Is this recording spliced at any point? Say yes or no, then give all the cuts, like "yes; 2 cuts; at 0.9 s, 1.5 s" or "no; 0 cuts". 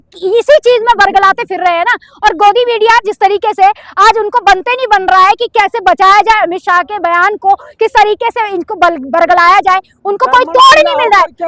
no; 0 cuts